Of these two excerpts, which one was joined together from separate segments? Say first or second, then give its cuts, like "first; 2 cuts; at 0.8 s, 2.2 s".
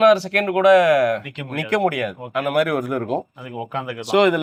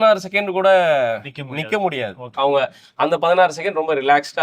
second; 1 cut; at 2.3 s